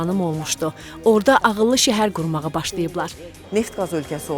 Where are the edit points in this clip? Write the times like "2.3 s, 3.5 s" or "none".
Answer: 3.3 s